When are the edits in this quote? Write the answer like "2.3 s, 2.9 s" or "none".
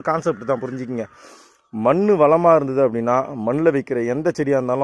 none